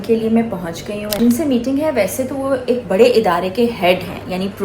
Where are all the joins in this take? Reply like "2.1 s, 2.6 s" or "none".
1.2 s